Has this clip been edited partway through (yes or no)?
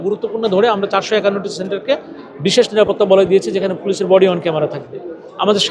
no